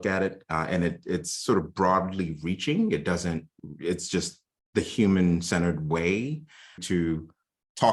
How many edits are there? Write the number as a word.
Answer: one